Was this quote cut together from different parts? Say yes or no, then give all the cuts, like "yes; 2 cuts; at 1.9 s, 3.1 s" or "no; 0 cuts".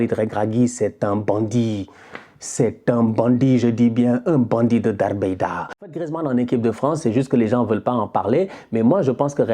yes; 1 cut; at 5.8 s